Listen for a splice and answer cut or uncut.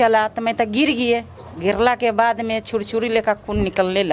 uncut